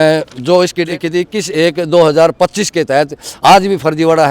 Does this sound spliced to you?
no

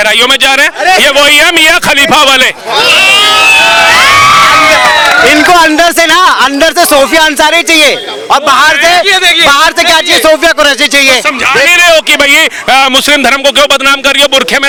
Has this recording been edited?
no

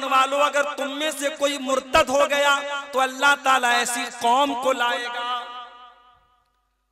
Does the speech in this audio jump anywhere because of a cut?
no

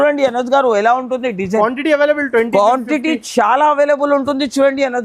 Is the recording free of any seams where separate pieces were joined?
yes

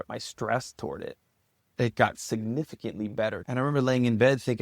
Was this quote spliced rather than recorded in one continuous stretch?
yes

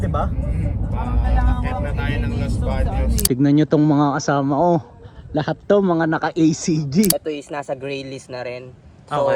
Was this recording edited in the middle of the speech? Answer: yes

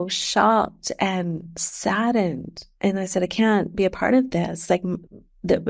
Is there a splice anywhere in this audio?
no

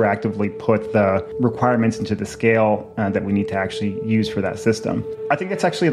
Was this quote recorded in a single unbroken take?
yes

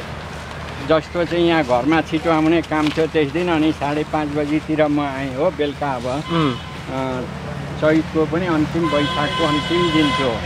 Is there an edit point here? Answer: no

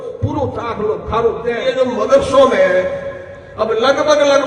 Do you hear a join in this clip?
yes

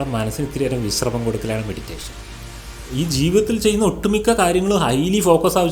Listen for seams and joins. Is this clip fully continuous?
yes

